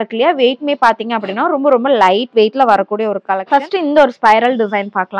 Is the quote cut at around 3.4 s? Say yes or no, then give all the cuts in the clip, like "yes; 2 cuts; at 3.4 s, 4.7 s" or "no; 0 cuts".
yes; 1 cut; at 3.4 s